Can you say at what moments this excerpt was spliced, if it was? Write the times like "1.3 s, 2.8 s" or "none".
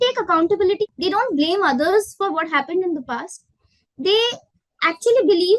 none